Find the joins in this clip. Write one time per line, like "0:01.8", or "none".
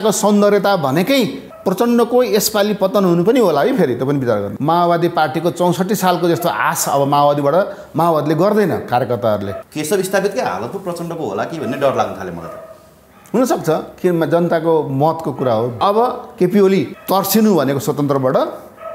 0:01.5
0:04.5
0:09.6
0:15.8
0:17.0